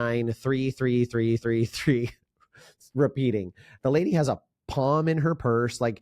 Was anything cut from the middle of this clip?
yes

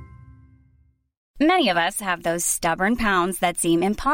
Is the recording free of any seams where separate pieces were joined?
yes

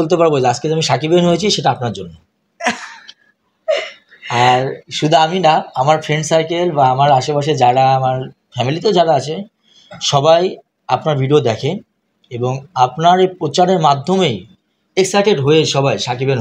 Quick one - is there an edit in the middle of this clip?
no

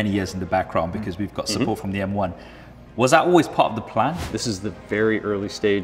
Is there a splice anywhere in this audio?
yes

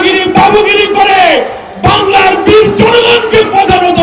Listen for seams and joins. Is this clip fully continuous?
yes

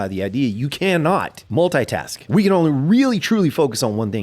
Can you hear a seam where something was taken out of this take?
yes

